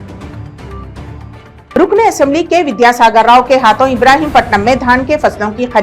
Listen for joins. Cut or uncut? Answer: uncut